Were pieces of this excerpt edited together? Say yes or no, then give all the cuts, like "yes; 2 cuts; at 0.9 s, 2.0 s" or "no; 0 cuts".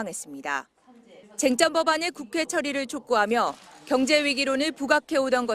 yes; 1 cut; at 3.9 s